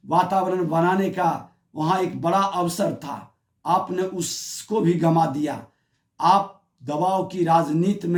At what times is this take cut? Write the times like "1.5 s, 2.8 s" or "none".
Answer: none